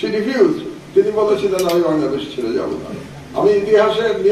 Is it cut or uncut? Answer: uncut